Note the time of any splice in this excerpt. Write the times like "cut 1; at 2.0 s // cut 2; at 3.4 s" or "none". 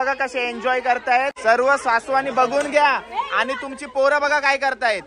cut 1; at 1.3 s